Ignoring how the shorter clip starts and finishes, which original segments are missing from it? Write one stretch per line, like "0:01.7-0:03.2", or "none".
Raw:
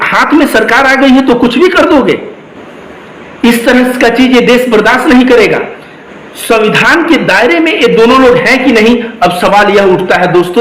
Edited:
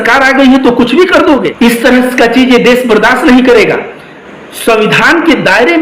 0:02.1-0:03.3